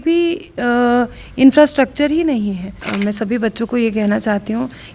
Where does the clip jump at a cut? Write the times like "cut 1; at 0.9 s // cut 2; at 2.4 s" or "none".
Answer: cut 1; at 2.8 s